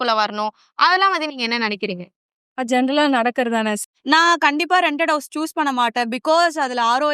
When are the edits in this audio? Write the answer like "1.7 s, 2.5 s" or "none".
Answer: 3.8 s